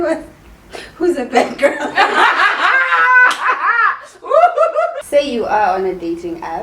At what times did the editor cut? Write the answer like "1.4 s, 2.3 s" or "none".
5.0 s